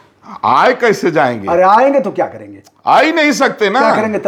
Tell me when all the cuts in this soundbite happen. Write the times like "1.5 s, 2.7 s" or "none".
none